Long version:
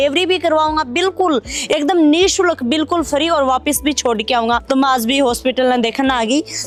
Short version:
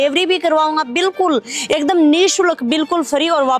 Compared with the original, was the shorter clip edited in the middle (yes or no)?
no